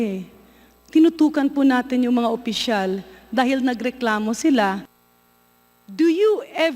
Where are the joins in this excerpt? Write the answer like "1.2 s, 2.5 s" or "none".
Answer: 4.9 s